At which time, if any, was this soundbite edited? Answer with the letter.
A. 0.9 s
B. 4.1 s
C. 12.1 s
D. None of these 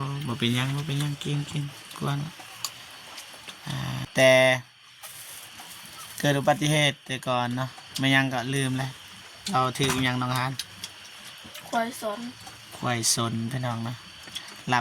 B